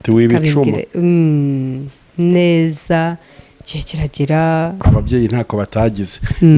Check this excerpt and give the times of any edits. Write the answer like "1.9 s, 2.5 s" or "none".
4.8 s